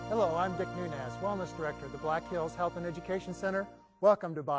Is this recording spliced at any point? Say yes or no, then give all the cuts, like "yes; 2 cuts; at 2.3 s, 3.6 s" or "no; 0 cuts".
yes; 1 cut; at 1.7 s